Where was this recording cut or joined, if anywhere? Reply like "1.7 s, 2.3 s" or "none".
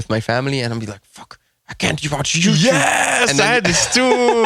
none